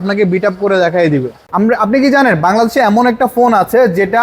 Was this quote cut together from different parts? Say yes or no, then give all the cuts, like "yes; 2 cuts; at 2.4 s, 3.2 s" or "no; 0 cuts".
yes; 1 cut; at 1.4 s